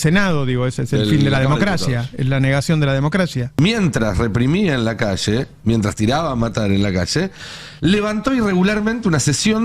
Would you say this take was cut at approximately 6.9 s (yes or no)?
no